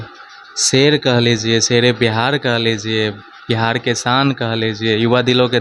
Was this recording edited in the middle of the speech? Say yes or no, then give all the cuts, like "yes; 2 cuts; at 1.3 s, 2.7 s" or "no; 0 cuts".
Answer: no; 0 cuts